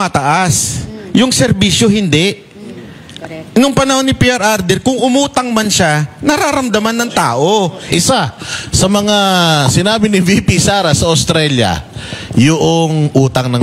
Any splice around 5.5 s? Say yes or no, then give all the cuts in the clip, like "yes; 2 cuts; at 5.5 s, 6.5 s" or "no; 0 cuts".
no; 1 cut; at 7.8 s